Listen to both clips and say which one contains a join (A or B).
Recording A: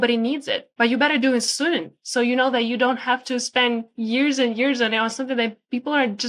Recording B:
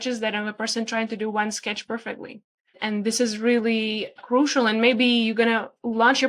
B